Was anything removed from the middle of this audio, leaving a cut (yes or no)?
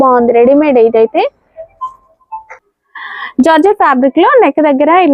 no